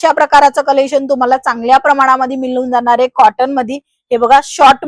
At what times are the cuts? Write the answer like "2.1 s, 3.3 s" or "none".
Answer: none